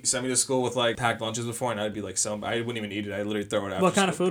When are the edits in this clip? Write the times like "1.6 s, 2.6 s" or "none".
1.0 s